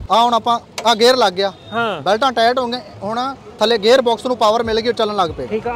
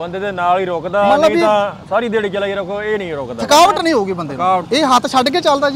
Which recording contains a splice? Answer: second; 1 cut; at 4.6 s

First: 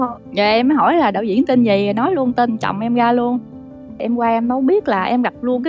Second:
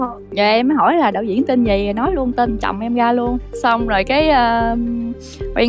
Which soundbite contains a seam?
first; 1 cut; at 3.6 s

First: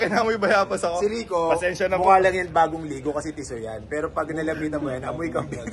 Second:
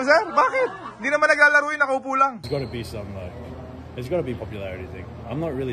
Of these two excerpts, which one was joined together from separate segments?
second; 1 cut; at 2.4 s

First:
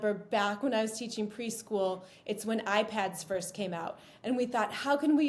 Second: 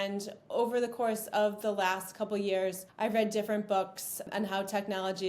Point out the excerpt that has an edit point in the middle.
second; 2 cuts; at 2.8 s, 4.2 s

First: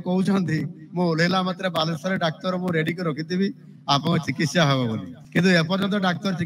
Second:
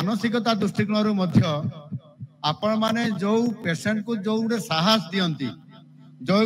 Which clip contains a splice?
first; 1 cut; at 5.1 s

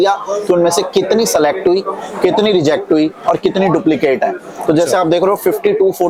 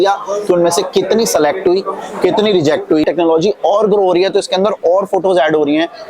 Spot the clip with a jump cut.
second; 1 cut; at 3.0 s

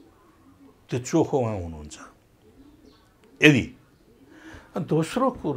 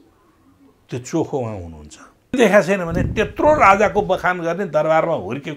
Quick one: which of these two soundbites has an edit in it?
second; 1 cut; at 2.3 s

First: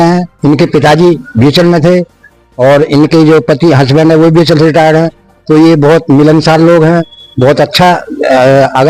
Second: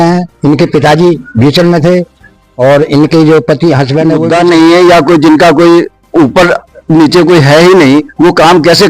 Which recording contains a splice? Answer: second; 1 cut; at 4.2 s

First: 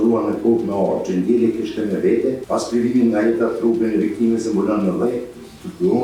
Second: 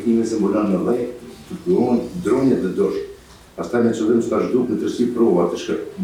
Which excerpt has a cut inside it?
first; 1 cut; at 2.4 s

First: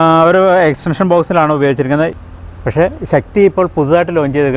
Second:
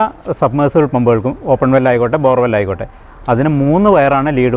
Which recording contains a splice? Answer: first; 1 cut; at 2.1 s

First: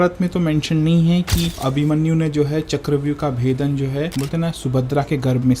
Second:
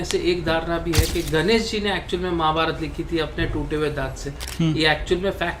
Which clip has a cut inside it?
first; 2 cuts; at 1.6 s, 4.1 s

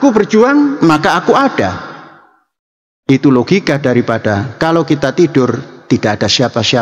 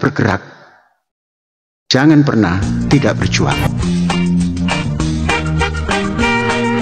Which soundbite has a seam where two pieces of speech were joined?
second; 1 cut; at 3.5 s

